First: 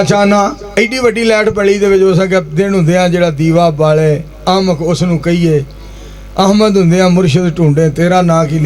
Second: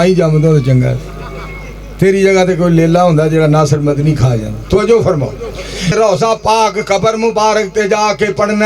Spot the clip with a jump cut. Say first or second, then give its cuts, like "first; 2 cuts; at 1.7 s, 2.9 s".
second; 1 cut; at 5.9 s